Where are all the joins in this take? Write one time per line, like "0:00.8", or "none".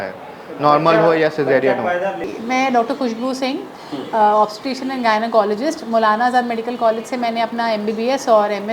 0:02.3